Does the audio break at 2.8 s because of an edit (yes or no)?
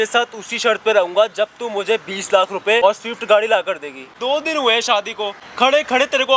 yes